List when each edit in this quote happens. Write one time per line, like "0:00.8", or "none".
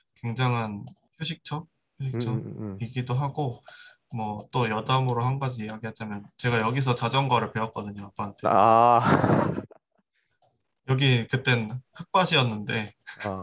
0:01.1